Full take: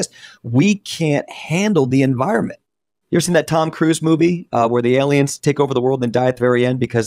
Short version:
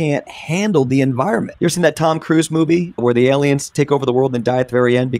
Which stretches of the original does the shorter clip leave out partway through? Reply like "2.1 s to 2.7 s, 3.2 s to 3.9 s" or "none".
2.5 s to 3.0 s, 4.5 s to 4.7 s